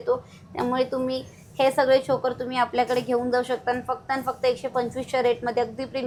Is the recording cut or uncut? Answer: uncut